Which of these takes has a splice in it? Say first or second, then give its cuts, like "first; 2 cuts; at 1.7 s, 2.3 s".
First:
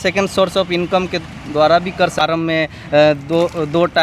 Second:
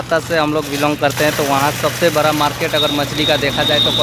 first; 1 cut; at 2.1 s